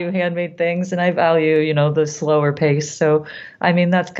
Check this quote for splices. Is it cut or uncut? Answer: uncut